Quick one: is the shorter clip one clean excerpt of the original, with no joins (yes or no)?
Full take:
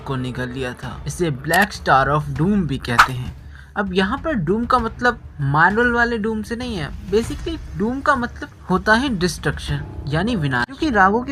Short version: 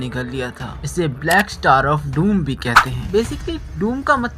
no